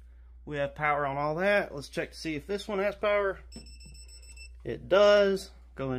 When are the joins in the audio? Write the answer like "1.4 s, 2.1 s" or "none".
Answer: none